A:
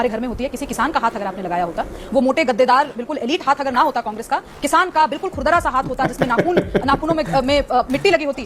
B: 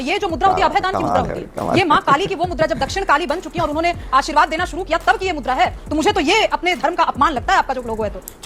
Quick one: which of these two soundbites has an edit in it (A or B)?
B